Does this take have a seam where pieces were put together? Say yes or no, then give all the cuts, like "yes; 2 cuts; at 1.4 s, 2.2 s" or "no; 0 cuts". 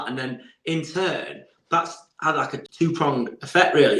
yes; 1 cut; at 2.6 s